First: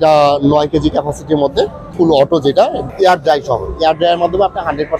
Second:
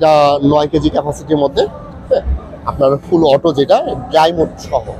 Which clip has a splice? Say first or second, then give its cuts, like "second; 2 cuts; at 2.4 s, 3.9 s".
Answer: first; 2 cuts; at 1.9 s, 2.9 s